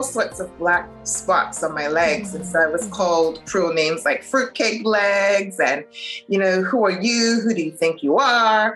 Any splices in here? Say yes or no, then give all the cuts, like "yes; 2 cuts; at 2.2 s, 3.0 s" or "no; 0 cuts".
no; 0 cuts